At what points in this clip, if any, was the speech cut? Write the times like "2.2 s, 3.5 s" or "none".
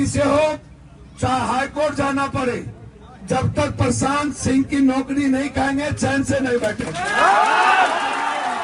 none